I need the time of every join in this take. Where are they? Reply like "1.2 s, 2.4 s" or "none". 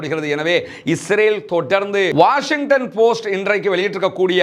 2.1 s